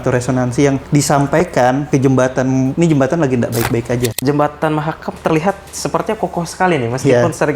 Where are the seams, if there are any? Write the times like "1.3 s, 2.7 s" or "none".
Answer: 0.8 s, 1.8 s, 2.7 s, 4.2 s